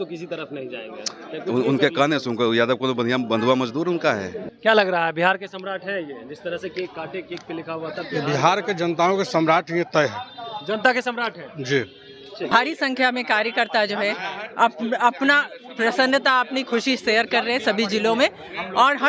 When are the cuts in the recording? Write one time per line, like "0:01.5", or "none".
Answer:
0:04.4
0:12.5